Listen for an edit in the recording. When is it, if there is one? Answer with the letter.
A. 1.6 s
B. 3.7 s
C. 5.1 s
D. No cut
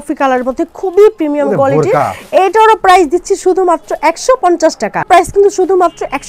C